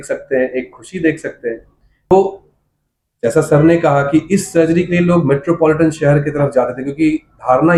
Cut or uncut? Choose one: uncut